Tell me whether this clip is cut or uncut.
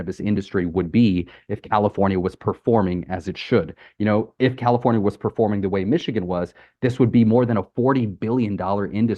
uncut